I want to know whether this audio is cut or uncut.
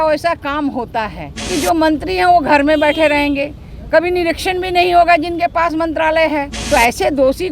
cut